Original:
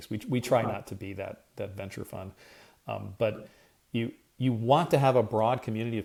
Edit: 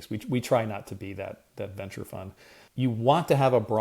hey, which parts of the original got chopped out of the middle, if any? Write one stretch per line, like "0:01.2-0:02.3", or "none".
0:02.6-0:04.2